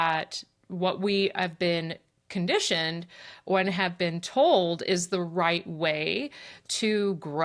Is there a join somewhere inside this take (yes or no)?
no